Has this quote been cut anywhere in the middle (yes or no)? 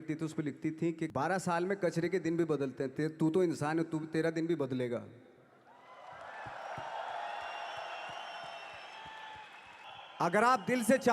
yes